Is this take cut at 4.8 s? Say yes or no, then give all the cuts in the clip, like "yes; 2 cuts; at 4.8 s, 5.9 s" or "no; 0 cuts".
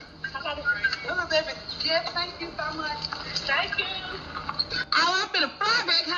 yes; 1 cut; at 4.8 s